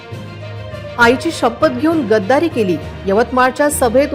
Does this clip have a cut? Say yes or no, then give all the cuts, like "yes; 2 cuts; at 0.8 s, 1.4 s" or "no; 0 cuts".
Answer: yes; 1 cut; at 0.9 s